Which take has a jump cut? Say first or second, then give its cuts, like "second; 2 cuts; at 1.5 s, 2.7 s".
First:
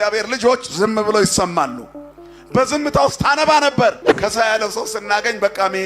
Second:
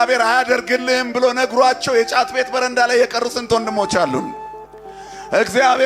first; 1 cut; at 4.1 s